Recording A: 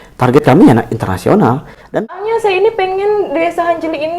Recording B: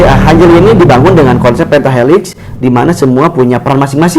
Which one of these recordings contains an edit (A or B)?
A